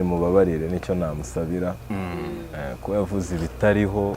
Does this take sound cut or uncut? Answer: uncut